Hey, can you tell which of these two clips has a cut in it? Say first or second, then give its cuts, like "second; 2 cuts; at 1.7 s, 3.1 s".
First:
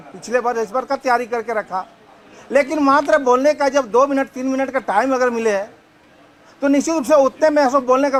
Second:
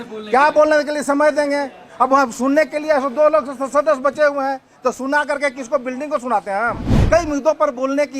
second; 1 cut; at 6.9 s